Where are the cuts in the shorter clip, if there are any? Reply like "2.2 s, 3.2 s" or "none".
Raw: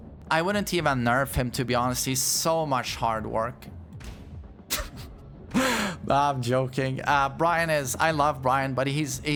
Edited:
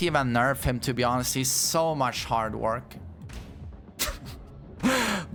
none